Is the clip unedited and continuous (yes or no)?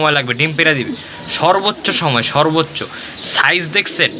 yes